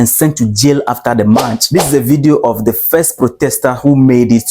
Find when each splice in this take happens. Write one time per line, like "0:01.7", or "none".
0:01.6